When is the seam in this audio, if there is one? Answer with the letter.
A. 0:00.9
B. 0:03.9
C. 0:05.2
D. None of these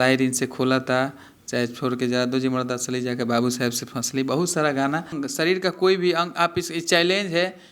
C